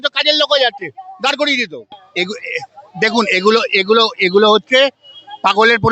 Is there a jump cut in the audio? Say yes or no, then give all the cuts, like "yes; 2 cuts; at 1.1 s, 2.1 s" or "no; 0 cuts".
yes; 1 cut; at 2.0 s